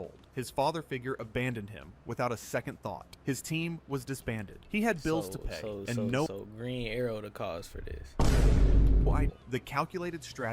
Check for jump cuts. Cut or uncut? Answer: cut